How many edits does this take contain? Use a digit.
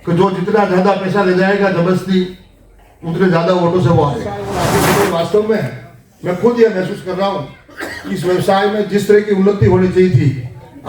1